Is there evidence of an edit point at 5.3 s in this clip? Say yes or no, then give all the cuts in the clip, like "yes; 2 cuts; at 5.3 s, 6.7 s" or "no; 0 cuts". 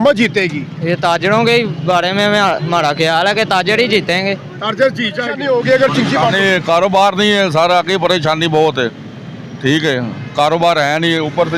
yes; 1 cut; at 5.3 s